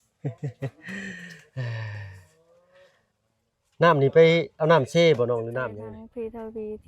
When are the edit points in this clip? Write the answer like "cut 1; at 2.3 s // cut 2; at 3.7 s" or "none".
cut 1; at 5.7 s